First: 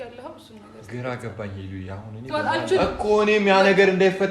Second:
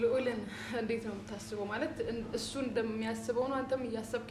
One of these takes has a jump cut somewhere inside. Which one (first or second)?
first